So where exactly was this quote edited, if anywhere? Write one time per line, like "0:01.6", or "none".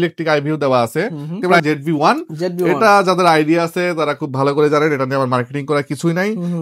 0:01.6